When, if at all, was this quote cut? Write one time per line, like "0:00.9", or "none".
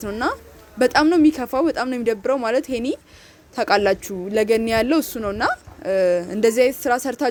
none